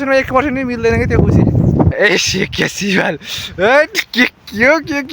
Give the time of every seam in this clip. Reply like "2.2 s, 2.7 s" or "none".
1.9 s, 3.5 s